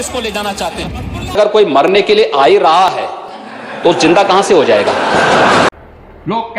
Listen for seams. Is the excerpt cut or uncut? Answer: cut